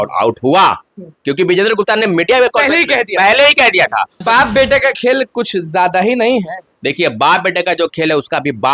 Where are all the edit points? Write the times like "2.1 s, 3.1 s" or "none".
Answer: 4.2 s